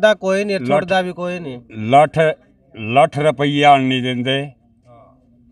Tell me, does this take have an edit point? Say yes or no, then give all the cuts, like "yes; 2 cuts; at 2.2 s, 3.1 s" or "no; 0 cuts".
no; 0 cuts